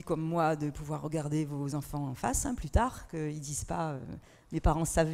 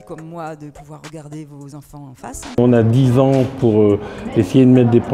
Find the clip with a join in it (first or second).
second